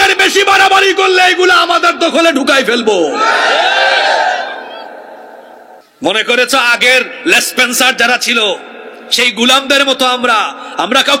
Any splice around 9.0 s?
no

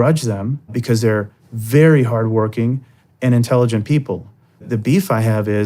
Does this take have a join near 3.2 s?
no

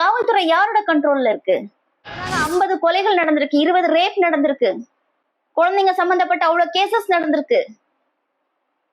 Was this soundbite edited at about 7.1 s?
no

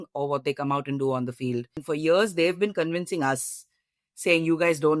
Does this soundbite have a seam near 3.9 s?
no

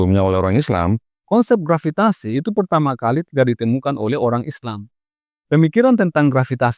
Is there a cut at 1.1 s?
yes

